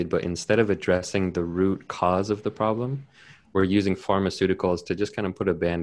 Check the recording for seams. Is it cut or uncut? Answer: uncut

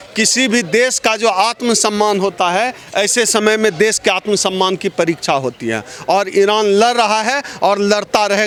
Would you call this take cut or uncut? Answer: uncut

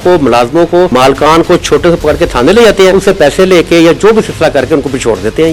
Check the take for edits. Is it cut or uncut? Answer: cut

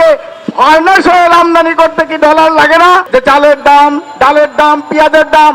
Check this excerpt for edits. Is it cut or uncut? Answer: cut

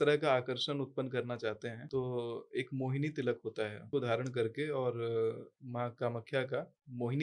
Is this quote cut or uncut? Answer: cut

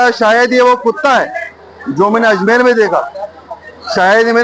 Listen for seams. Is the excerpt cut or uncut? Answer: uncut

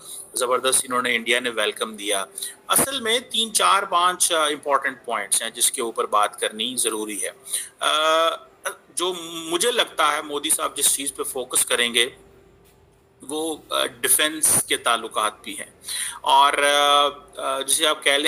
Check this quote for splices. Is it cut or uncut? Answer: uncut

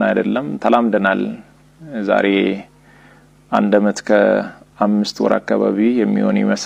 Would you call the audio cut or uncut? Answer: uncut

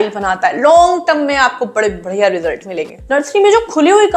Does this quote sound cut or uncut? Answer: cut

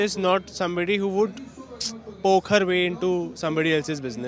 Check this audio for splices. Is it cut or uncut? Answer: uncut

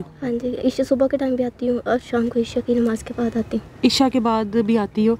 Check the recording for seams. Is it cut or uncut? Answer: uncut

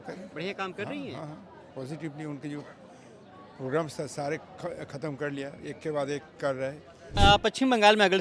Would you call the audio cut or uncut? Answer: cut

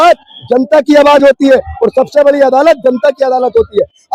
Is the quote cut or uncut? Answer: uncut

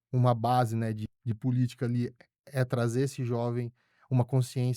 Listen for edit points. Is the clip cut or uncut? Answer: cut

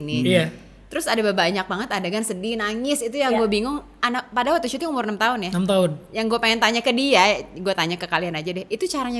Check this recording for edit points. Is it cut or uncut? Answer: uncut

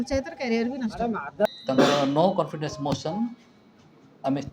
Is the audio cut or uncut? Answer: cut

